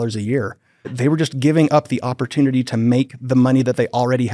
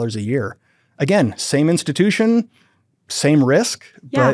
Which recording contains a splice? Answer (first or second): first